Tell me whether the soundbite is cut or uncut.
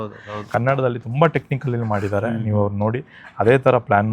uncut